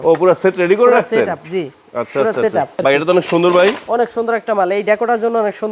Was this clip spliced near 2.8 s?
yes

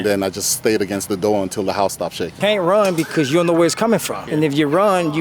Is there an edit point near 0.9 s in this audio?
no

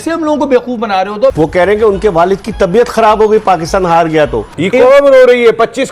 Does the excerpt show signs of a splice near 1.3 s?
yes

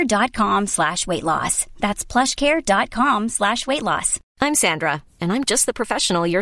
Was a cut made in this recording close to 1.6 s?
no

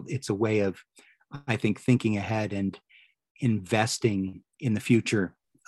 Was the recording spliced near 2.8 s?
no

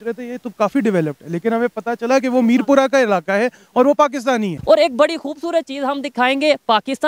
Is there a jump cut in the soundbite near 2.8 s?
no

